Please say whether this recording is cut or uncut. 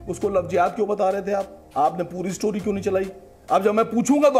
cut